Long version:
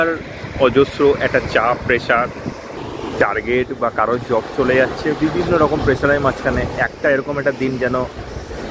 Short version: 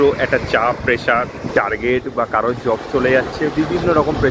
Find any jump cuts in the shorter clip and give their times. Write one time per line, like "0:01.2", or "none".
0:01.5

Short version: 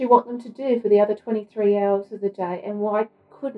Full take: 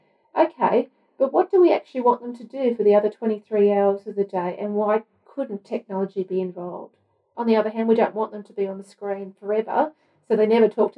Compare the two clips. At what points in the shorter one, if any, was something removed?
none

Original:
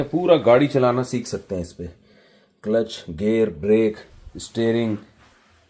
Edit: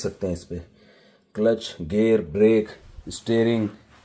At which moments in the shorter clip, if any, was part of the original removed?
none

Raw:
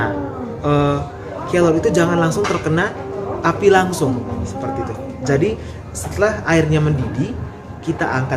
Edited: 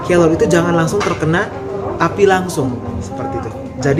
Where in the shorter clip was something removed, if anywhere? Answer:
none

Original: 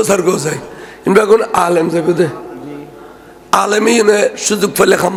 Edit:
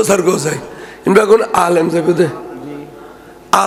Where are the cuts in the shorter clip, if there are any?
none

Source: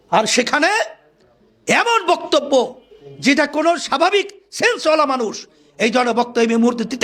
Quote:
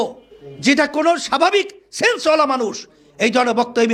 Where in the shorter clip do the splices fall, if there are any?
none

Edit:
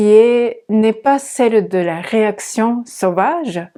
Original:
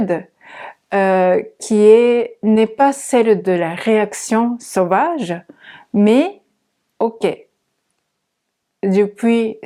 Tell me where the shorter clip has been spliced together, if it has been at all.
none

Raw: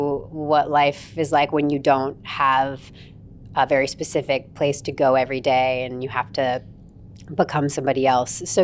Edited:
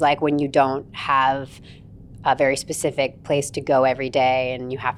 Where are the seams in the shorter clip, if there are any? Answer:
none

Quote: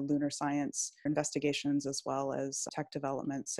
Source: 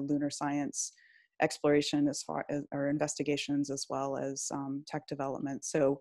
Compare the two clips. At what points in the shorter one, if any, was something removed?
0:01.0
0:02.7

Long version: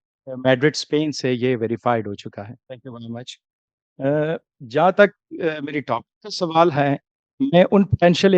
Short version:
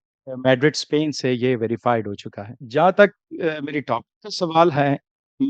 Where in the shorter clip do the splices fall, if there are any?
0:02.5

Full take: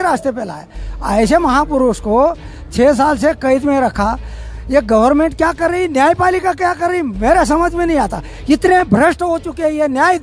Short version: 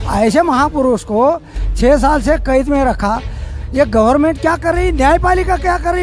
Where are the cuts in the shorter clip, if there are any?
none

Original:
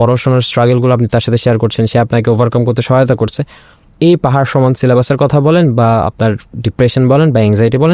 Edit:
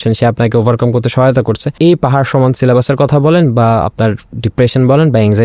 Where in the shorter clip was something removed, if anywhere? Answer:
0:01.7

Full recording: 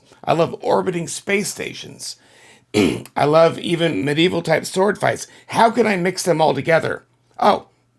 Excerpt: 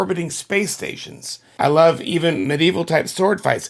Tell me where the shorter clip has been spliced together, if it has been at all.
0:01.5

